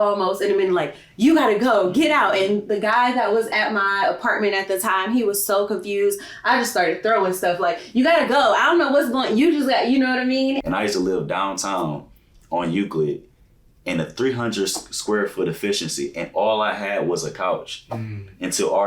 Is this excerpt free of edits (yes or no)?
no